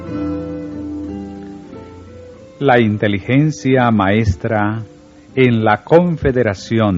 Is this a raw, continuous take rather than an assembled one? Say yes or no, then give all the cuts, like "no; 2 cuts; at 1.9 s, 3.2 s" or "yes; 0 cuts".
no; 1 cut; at 4.3 s